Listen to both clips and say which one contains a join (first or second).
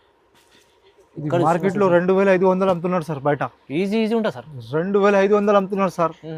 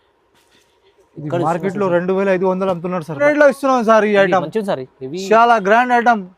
second